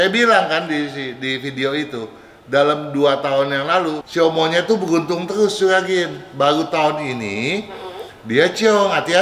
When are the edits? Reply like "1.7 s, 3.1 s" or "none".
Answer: 4.0 s